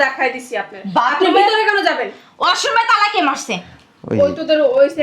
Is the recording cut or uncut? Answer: uncut